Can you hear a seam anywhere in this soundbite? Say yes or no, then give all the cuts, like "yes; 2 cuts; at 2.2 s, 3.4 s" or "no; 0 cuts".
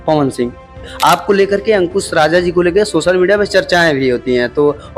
yes; 1 cut; at 0.9 s